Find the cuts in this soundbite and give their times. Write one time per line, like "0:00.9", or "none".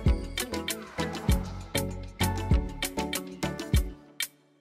none